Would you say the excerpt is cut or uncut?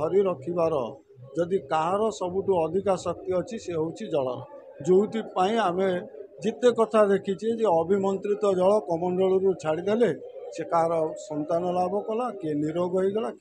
uncut